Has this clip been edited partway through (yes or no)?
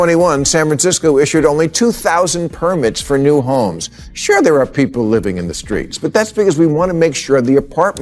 no